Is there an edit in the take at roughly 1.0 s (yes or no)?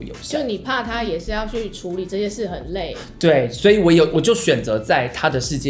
no